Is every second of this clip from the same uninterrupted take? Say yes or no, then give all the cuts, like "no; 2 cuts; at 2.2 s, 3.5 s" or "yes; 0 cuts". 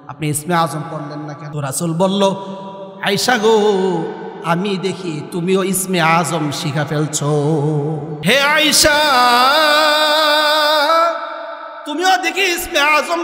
no; 2 cuts; at 1.4 s, 8.1 s